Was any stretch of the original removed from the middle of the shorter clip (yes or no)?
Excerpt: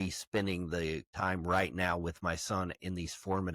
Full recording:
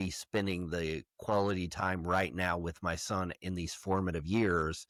yes